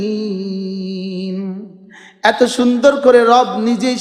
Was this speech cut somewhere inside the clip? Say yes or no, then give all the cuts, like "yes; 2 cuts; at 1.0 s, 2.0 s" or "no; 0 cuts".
no; 0 cuts